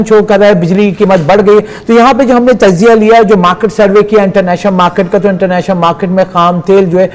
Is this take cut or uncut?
uncut